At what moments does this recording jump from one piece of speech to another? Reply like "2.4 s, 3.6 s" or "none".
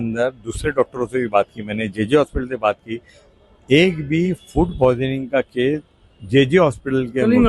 none